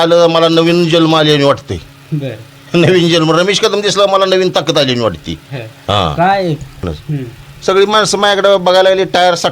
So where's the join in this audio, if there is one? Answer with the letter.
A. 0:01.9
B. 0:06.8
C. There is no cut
B